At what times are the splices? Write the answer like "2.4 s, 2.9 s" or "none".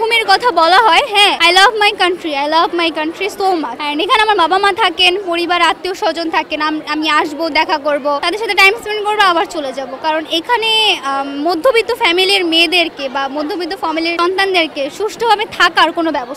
1.4 s, 3.8 s, 8.2 s, 14.2 s

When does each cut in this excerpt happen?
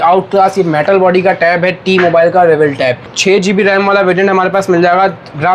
3.1 s

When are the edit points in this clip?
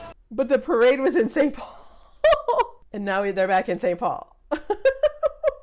2.8 s

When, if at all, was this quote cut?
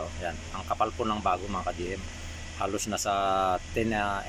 none

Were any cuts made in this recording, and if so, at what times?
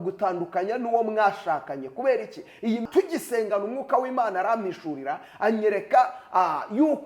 2.9 s

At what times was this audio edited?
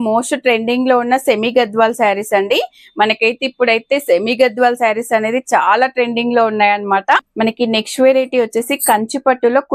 7.3 s

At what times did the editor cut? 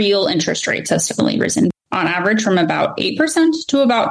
1.7 s

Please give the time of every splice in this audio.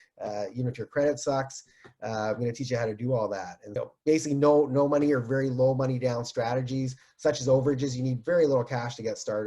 3.6 s

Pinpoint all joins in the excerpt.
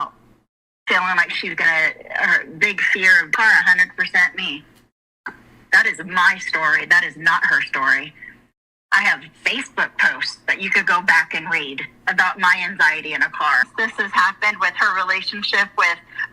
13.7 s

